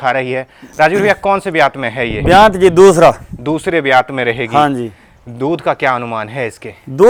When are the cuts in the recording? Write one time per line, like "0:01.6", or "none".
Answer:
none